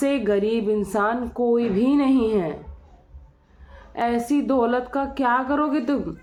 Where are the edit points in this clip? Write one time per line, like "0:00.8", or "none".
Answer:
none